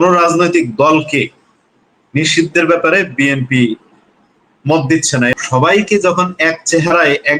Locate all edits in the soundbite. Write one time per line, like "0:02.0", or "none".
0:05.3